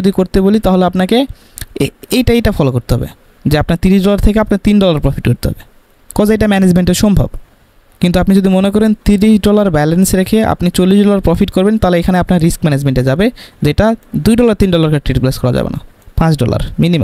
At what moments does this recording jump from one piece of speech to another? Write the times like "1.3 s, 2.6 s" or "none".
none